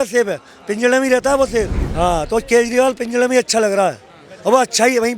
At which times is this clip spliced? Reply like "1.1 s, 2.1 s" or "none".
1.8 s